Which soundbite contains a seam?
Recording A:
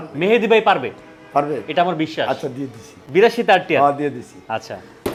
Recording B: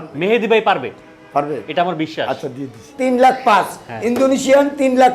B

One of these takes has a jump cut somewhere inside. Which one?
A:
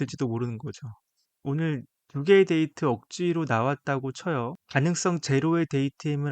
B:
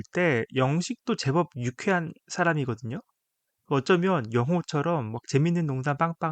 A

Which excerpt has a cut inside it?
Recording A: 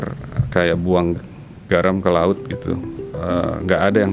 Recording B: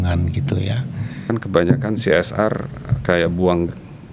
B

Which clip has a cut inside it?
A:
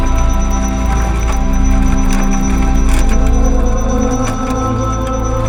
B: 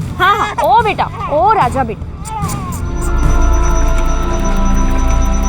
B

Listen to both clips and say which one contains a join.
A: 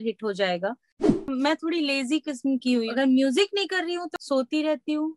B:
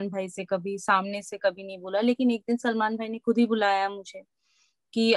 A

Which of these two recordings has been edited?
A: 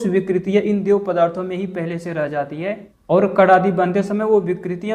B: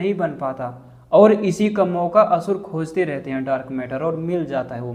A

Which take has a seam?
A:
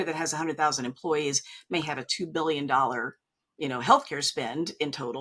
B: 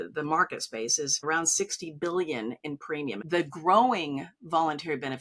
B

